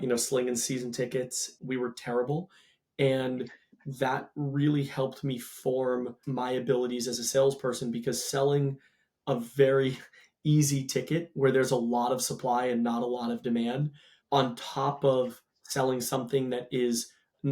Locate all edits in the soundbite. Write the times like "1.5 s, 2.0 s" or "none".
1.5 s